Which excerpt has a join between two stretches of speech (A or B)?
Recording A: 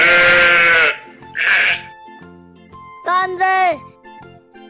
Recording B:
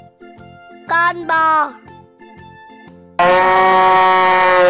B